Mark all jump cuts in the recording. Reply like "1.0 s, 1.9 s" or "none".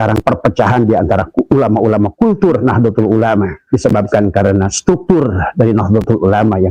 2.1 s, 3.6 s